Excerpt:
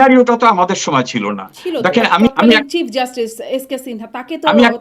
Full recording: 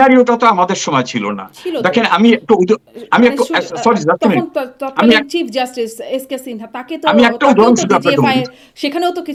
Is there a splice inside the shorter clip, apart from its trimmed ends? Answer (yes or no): yes